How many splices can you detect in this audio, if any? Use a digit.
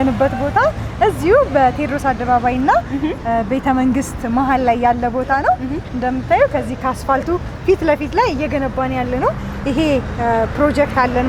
0